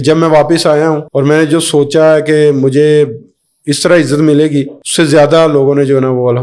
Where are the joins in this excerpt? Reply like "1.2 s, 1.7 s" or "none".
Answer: 1.1 s, 4.8 s